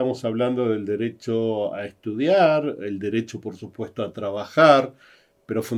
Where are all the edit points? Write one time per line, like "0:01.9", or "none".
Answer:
none